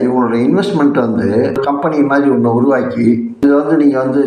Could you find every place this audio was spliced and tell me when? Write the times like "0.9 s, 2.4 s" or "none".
1.6 s, 3.4 s